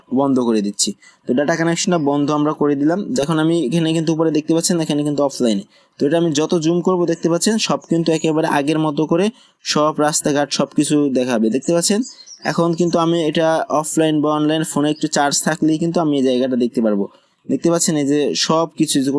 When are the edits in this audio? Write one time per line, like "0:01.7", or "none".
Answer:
0:03.1